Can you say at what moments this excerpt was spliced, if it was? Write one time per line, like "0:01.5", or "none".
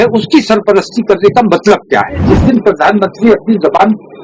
0:02.2